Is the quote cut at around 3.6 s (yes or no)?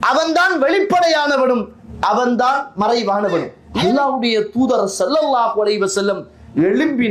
yes